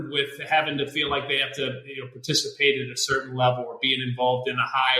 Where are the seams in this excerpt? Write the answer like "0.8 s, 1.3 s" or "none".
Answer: none